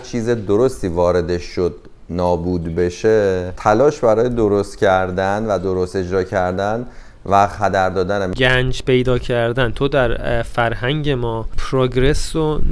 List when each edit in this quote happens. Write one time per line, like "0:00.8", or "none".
0:03.5
0:08.3